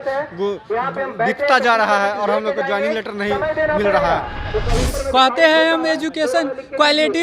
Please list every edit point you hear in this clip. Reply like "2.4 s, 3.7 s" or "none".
4.4 s

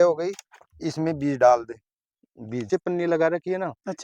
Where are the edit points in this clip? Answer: 2.6 s

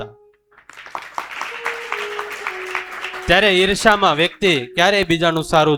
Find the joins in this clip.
none

